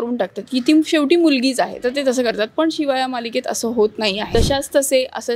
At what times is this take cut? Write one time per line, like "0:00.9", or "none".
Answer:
0:04.3